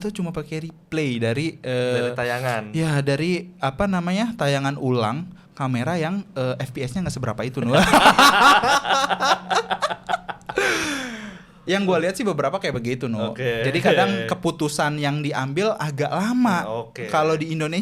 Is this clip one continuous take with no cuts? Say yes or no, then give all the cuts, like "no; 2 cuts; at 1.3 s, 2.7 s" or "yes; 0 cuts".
yes; 0 cuts